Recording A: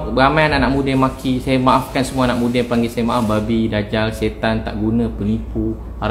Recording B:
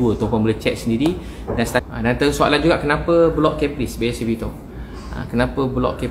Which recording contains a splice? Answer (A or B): B